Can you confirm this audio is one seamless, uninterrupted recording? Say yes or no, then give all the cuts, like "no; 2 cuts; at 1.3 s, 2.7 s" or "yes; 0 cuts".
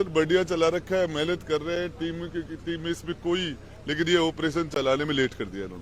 yes; 0 cuts